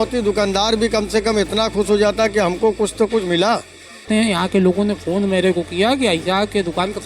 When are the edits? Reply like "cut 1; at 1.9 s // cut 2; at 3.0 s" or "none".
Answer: cut 1; at 4.0 s